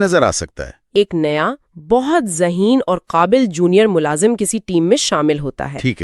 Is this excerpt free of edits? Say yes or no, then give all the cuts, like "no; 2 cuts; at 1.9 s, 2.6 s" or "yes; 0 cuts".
no; 1 cut; at 0.9 s